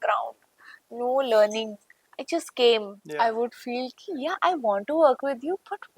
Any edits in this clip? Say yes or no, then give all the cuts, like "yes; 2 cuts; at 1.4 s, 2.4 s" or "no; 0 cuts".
yes; 1 cut; at 3.0 s